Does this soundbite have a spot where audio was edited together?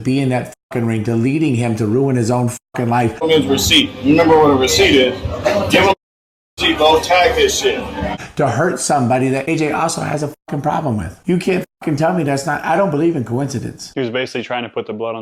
no; 0 cuts

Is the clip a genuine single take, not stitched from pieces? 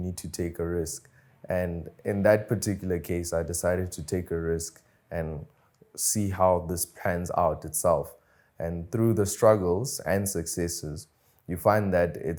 yes; 0 cuts

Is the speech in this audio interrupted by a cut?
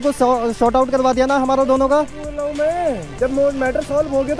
no; 0 cuts

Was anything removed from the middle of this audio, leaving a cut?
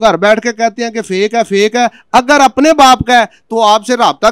no; 0 cuts

